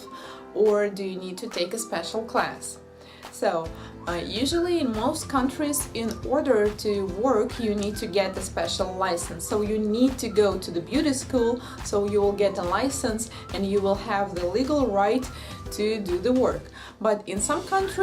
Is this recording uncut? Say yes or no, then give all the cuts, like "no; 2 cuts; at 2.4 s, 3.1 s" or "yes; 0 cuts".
no; 1 cut; at 9.0 s